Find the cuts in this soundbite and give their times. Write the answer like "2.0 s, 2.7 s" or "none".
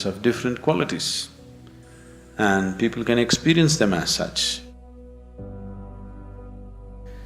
none